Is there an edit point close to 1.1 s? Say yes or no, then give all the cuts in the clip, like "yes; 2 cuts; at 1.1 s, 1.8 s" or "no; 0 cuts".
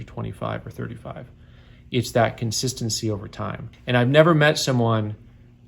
no; 1 cut; at 3.7 s